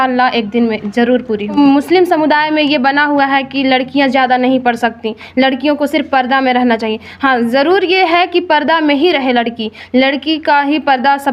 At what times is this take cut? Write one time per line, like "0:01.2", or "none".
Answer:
0:01.5